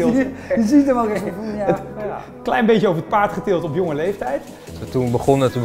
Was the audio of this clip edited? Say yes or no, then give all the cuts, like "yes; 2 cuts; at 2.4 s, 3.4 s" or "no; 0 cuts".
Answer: yes; 1 cut; at 4.8 s